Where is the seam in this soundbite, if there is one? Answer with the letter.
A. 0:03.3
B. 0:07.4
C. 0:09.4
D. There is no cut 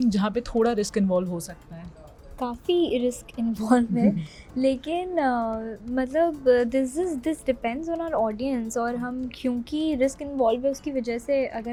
D